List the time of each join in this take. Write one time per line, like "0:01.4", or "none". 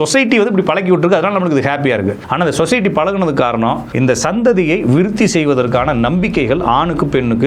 0:02.2
0:03.9